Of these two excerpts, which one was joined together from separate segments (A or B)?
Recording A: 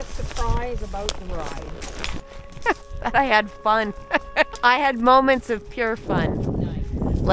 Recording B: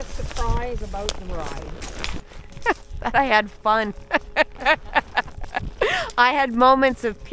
A